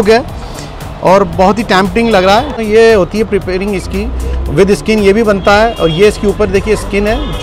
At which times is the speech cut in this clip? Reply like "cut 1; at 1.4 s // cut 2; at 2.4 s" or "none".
cut 1; at 2.6 s